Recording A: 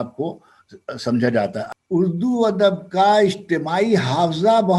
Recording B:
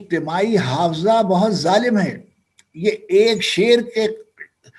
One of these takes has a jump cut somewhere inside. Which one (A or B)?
A